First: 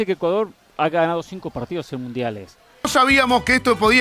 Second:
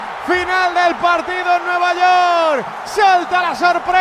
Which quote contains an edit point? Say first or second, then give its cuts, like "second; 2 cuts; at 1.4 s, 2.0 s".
first; 1 cut; at 2.9 s